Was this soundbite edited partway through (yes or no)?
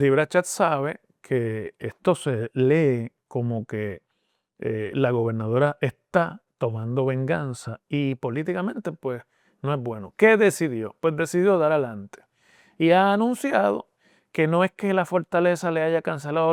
no